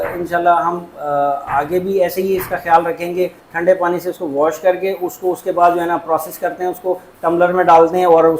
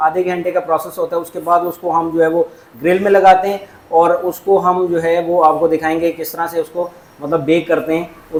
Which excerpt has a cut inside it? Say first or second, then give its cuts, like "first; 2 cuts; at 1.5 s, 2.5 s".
first; 1 cut; at 3.5 s